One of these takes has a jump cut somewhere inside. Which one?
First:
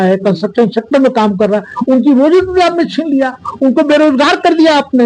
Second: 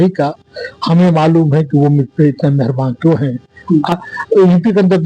second; 1 cut; at 3.9 s

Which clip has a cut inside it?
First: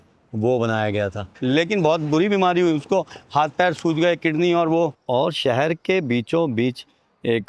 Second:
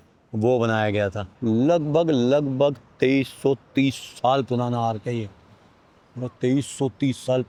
first; 2 cuts; at 1.3 s, 5.0 s

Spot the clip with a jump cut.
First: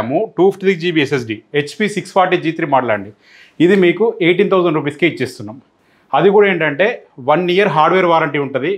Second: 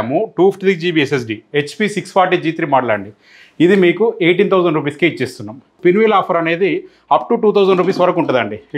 second; 1 cut; at 5.8 s

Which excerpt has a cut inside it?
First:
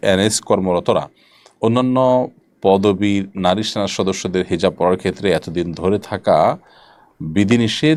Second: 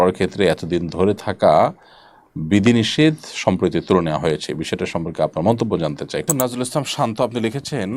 second; 1 cut; at 6.2 s

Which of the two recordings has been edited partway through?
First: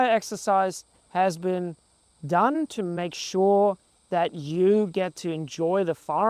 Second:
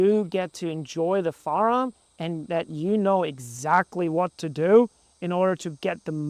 first; 1 cut; at 2.7 s

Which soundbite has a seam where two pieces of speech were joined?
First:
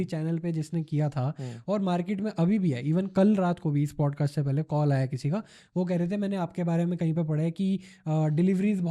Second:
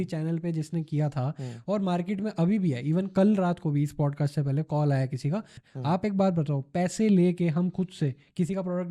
second; 1 cut; at 5.6 s

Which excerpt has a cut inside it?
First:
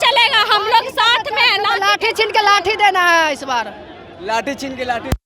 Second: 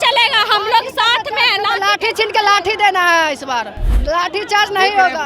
second; 1 cut; at 3.9 s

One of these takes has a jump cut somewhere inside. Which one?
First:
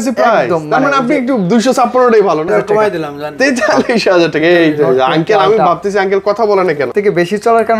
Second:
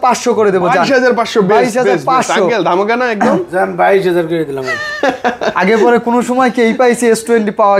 first; 2 cuts; at 2.5 s, 6.9 s

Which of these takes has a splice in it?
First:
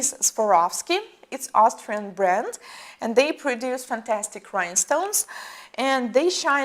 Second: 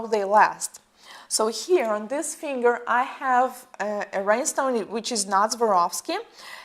first; 1 cut; at 5.2 s

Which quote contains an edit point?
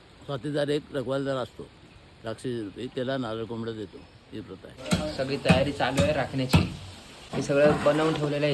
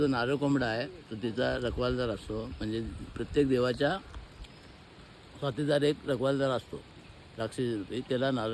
first; 1 cut; at 4.7 s

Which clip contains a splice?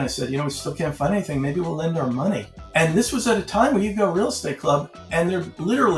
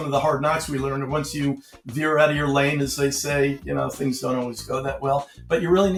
first; 1 cut; at 2.6 s

